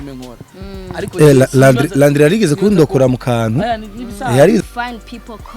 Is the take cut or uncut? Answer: cut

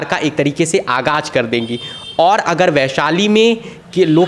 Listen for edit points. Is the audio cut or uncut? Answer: uncut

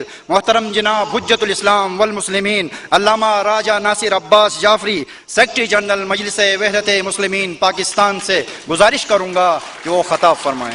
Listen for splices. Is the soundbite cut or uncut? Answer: uncut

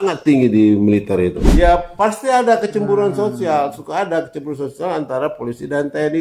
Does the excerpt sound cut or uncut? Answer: cut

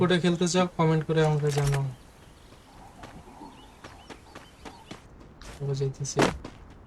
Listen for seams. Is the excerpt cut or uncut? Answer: uncut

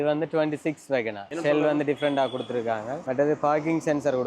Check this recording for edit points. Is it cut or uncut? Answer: cut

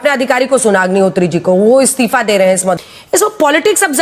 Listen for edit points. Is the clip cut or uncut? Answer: cut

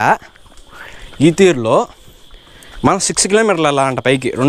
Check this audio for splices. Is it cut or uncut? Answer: uncut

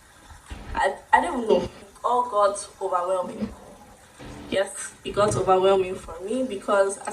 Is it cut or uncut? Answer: cut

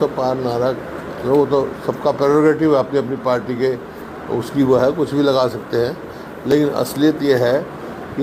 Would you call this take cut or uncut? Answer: uncut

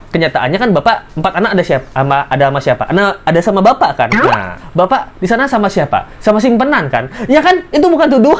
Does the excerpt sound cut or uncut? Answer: cut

